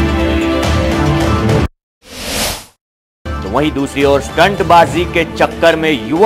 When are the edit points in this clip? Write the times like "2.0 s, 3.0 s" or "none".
1.7 s, 3.4 s